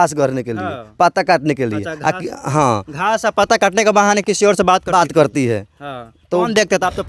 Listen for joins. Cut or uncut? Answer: uncut